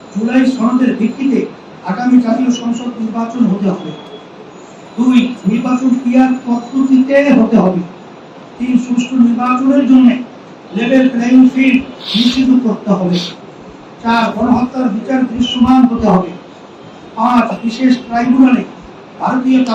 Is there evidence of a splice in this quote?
no; 0 cuts

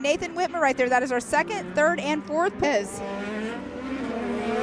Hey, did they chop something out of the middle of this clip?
yes; 1 cut; at 2.6 s

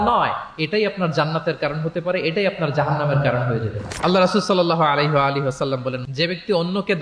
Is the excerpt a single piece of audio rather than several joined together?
no; 1 cut; at 6.0 s

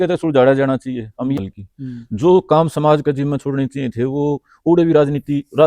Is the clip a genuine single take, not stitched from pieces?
no; 1 cut; at 1.4 s

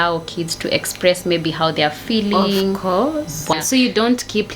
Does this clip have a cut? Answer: yes; 1 cut; at 3.5 s

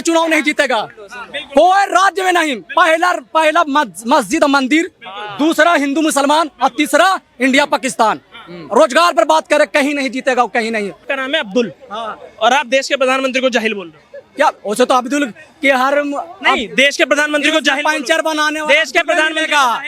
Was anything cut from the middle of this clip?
yes; 1 cut; at 11.0 s

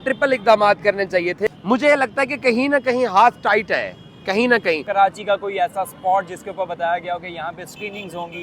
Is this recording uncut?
no; 2 cuts; at 1.4 s, 4.8 s

